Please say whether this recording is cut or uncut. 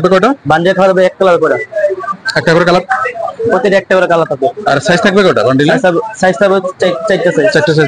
uncut